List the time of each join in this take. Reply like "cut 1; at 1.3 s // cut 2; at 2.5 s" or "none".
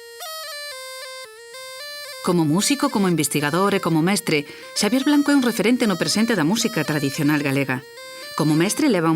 cut 1; at 4.9 s